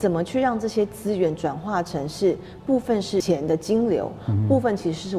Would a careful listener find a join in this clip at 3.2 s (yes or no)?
yes